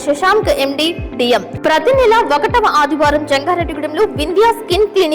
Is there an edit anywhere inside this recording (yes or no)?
yes